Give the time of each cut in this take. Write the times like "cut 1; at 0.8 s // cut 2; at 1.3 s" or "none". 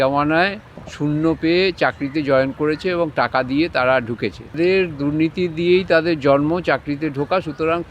cut 1; at 4.6 s